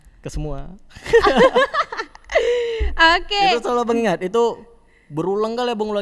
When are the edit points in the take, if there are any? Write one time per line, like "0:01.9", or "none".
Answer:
none